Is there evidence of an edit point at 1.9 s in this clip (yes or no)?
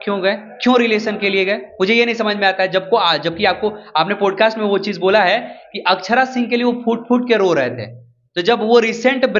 no